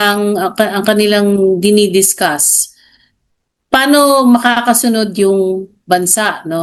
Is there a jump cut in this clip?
no; 0 cuts

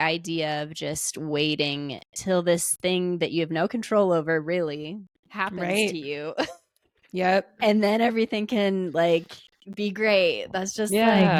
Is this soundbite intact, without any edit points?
yes; 0 cuts

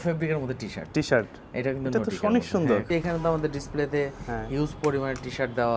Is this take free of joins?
no; 1 cut; at 2.9 s

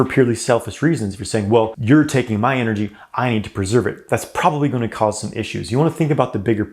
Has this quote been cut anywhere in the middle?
yes; 1 cut; at 1.8 s

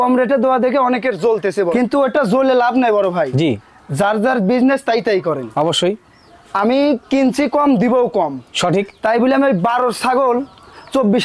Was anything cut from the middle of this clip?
yes; 1 cut; at 1.7 s

